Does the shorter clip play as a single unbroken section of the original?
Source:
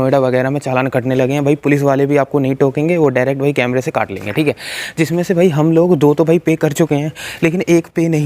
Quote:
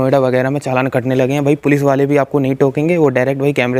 yes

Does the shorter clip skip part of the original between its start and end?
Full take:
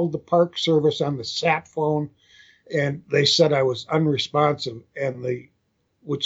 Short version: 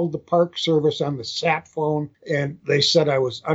yes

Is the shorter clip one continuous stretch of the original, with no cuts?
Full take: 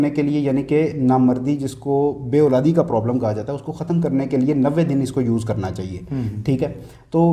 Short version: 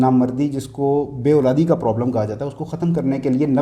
yes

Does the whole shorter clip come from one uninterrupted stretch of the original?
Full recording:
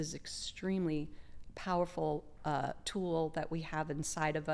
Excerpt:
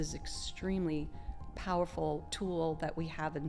no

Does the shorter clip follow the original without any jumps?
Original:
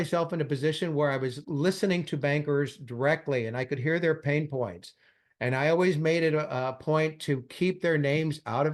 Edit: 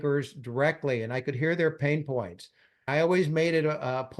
no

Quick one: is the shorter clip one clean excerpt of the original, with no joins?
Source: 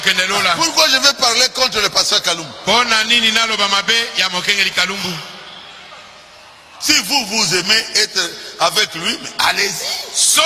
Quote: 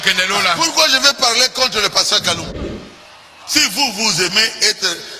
no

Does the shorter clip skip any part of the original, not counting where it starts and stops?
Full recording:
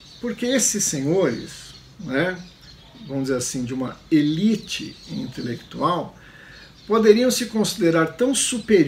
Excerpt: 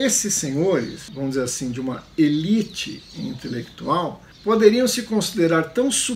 yes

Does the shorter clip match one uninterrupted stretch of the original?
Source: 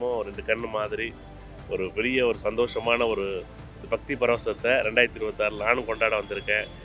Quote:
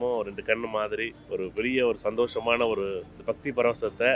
no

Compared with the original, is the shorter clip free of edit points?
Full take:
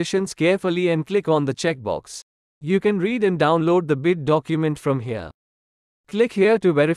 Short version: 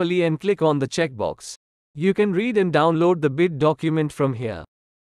yes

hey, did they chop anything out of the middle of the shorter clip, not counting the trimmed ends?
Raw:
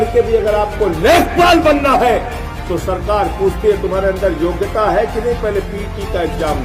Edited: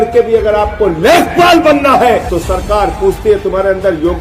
yes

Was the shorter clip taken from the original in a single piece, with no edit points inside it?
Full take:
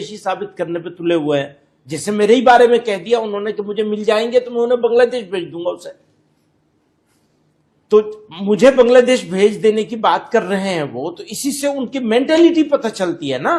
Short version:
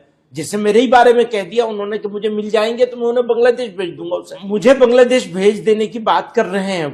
no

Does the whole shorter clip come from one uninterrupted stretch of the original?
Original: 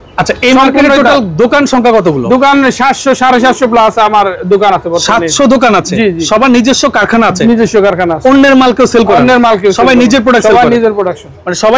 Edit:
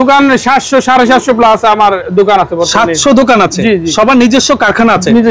yes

